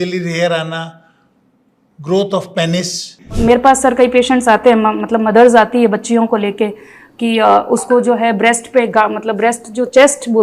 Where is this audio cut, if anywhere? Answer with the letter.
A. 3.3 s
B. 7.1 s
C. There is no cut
A